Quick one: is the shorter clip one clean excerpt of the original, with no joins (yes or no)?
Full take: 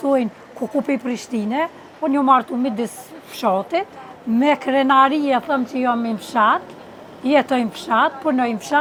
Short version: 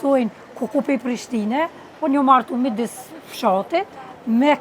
yes